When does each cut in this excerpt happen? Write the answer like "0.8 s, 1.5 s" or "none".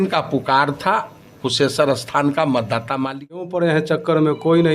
3.4 s